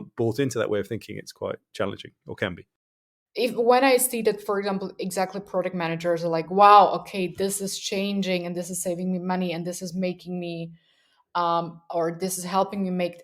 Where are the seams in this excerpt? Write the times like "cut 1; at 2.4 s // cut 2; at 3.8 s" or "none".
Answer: cut 1; at 3.2 s